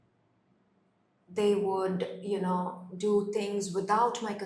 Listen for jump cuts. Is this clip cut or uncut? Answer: uncut